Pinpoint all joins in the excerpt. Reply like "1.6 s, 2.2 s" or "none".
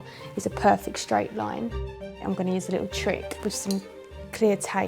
3.3 s